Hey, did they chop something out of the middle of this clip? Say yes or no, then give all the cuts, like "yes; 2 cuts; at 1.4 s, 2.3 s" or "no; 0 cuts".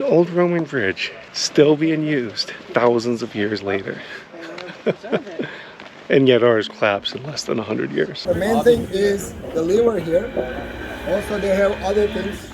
yes; 1 cut; at 8.2 s